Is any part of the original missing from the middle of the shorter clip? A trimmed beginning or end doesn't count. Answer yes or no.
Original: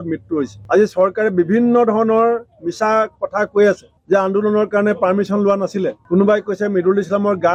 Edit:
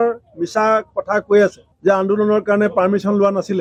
no